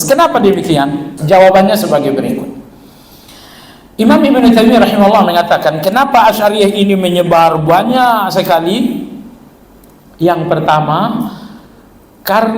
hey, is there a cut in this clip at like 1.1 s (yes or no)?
yes